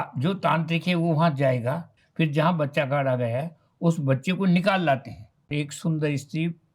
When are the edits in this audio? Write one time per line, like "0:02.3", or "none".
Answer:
0:01.9
0:05.5